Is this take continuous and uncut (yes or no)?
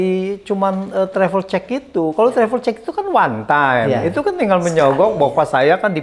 yes